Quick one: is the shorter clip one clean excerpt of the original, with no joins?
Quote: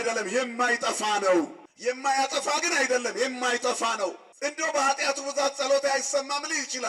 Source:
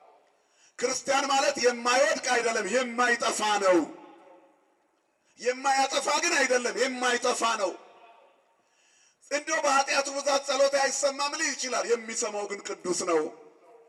no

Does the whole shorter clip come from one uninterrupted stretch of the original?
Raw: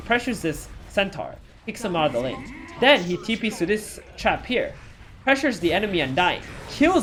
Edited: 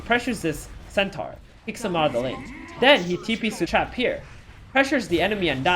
no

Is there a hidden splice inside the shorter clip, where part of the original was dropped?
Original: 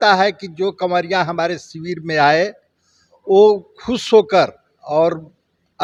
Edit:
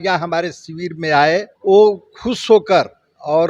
yes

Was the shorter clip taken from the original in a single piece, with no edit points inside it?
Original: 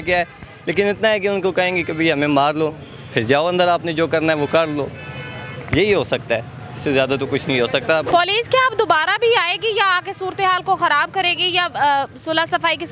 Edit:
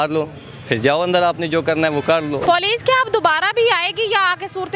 no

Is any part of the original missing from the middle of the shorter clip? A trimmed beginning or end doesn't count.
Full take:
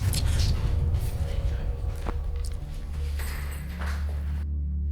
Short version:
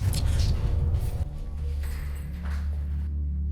yes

